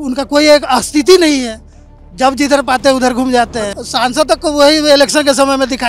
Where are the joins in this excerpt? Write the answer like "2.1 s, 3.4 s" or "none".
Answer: 3.8 s

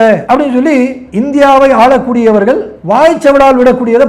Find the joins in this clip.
2.7 s

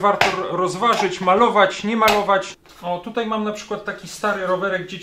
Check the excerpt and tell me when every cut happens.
2.6 s

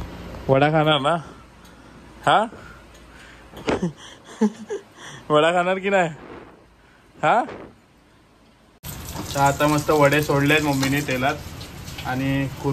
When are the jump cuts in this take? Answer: 8.8 s

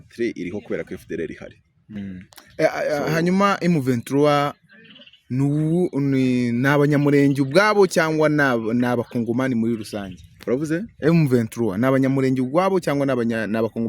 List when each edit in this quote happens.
1.9 s

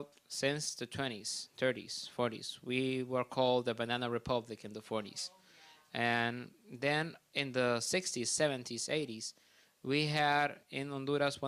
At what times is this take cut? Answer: 7.4 s

